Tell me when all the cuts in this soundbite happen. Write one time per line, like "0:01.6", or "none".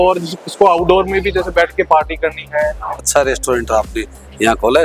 0:03.0